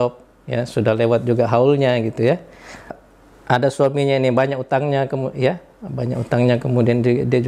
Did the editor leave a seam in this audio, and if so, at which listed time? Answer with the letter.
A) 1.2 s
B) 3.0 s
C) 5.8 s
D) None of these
B